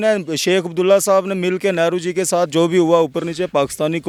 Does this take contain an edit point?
no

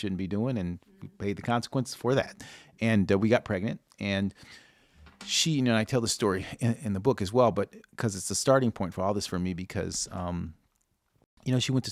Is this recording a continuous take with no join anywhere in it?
yes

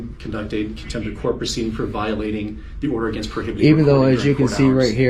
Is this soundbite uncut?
yes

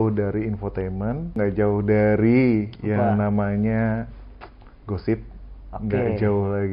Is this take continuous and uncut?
no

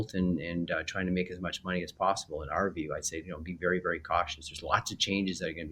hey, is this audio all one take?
yes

